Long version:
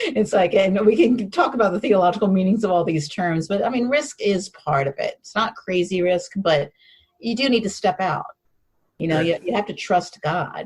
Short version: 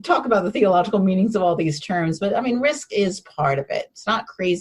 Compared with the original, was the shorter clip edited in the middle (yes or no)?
no